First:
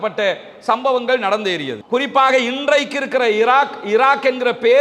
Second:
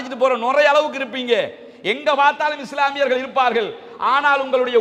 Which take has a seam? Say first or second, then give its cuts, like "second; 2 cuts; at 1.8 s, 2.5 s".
first; 1 cut; at 1.8 s